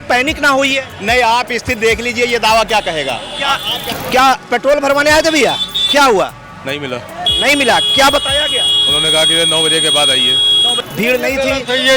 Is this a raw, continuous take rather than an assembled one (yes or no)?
no